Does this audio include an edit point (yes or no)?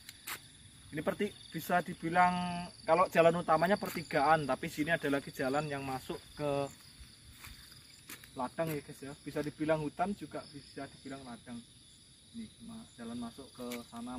no